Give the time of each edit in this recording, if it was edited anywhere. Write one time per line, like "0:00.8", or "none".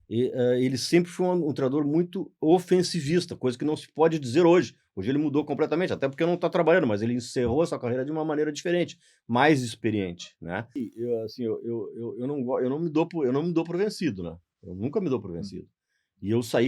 0:10.8